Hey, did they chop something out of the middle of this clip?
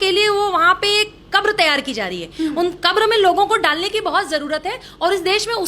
no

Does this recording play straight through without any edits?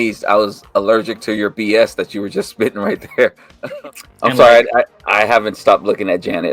no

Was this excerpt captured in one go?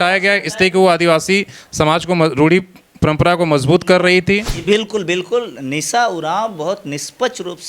no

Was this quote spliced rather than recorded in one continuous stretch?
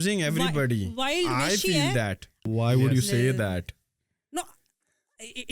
yes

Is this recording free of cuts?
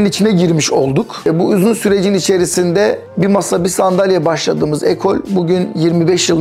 yes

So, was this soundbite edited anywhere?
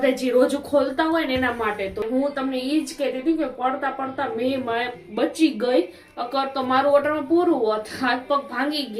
yes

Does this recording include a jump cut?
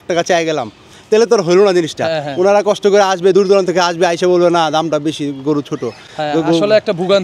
no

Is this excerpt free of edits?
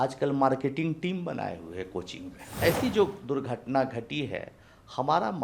no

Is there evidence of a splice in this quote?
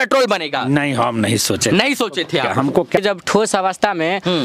yes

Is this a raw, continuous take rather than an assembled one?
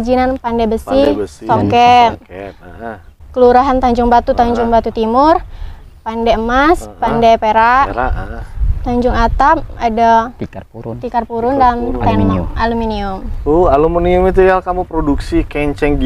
yes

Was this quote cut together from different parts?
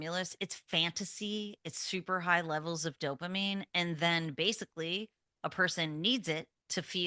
no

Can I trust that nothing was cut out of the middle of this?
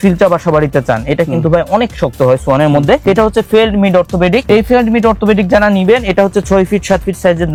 yes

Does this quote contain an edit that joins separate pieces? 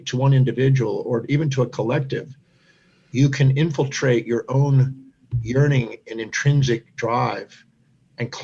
no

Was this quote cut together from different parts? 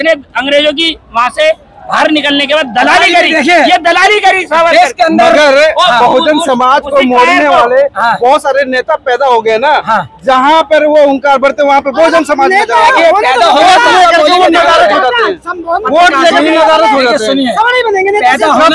no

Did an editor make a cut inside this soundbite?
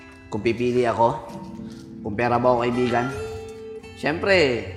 no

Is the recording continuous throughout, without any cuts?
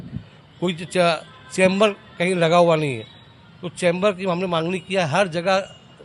yes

